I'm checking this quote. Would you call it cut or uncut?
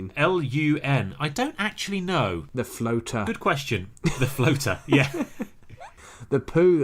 cut